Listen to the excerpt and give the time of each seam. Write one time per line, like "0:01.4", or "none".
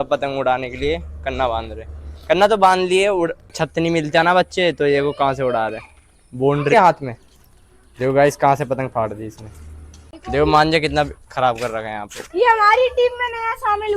0:03.5
0:06.7
0:10.1